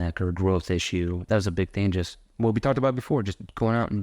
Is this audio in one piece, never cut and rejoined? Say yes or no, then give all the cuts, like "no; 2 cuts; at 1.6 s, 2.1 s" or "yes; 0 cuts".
no; 1 cut; at 1.3 s